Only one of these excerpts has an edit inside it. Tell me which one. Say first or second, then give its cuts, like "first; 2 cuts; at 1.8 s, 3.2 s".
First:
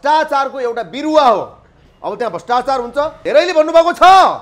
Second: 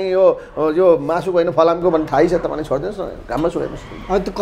first; 1 cut; at 3.2 s